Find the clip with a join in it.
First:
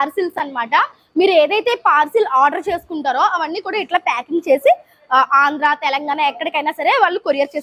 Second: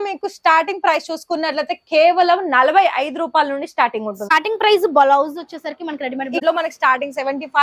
second; 2 cuts; at 4.3 s, 6.4 s

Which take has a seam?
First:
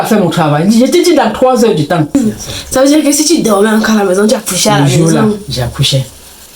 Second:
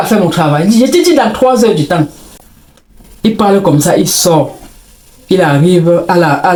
first; 1 cut; at 2.2 s

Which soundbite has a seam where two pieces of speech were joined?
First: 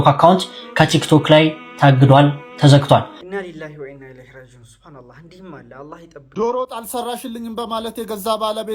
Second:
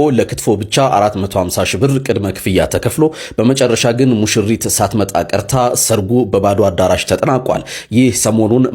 first; 2 cuts; at 3.2 s, 6.2 s

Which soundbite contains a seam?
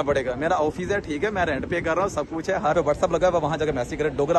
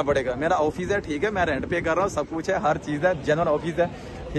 first; 1 cut; at 2.7 s

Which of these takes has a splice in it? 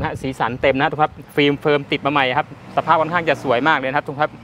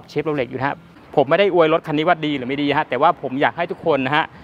second; 1 cut; at 0.9 s

